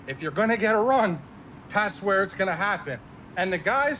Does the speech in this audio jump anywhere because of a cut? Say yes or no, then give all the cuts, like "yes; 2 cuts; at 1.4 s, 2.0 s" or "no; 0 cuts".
no; 0 cuts